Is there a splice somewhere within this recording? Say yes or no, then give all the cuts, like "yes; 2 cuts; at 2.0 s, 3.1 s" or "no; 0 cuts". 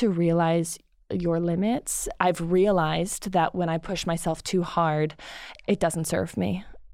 yes; 1 cut; at 2.1 s